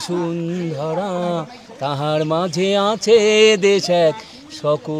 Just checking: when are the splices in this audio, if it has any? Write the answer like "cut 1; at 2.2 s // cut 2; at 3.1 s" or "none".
none